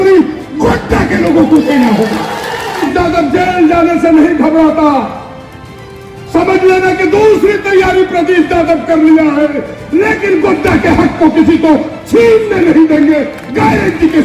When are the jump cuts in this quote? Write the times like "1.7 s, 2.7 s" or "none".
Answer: 2.9 s